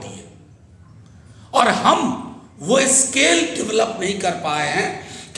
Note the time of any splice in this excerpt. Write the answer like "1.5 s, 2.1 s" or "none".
none